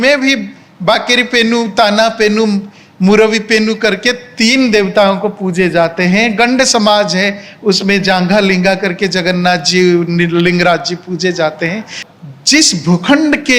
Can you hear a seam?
yes; 1 cut; at 12.0 s

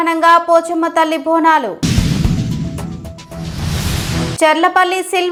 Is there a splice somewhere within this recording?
no; 0 cuts

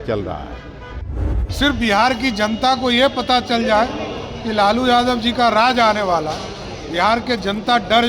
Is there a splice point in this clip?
yes; 1 cut; at 1.2 s

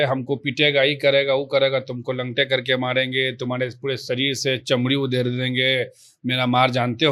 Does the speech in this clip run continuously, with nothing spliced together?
yes; 0 cuts

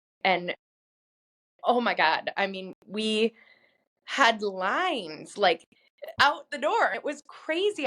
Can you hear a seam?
yes; 1 cut; at 6.2 s

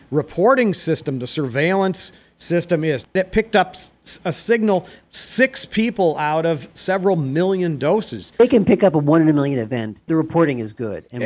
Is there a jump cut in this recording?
yes; 2 cuts; at 3.2 s, 8.4 s

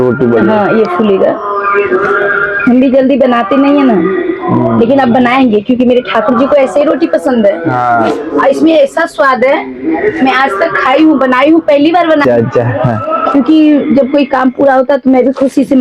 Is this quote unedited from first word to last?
no; 1 cut; at 12.2 s

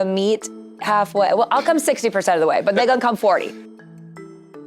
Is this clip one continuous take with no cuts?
no; 1 cut; at 3.5 s

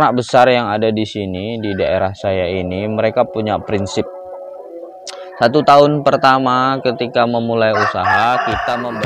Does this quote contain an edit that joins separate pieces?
no; 0 cuts

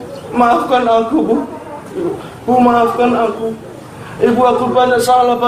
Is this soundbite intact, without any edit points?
yes; 0 cuts

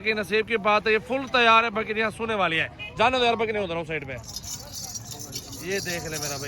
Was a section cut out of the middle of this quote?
no; 0 cuts

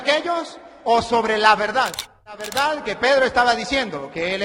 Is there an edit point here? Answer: yes; 1 cut; at 2.5 s

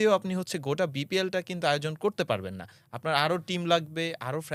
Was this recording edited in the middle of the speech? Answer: no; 0 cuts

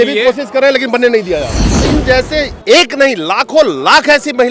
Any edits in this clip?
yes; 1 cut; at 1.8 s

